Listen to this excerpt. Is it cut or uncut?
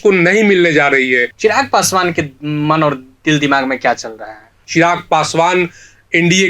cut